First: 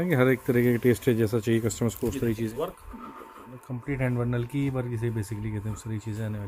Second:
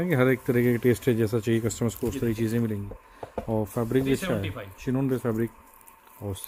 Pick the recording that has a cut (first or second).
first